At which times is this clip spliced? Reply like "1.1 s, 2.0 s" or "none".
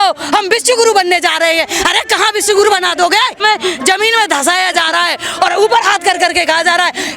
3.4 s